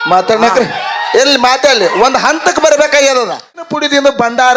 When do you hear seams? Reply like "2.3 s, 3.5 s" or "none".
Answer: 3.6 s